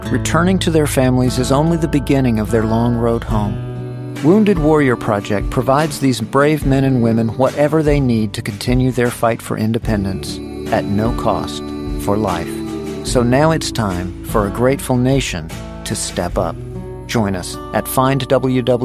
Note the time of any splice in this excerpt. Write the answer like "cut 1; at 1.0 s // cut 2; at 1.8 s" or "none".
none